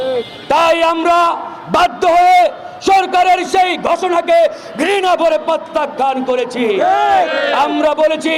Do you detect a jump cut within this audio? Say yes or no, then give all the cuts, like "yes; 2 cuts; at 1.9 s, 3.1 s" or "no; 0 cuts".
no; 0 cuts